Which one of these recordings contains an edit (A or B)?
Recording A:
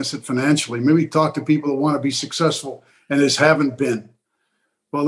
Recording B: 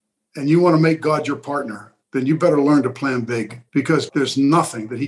B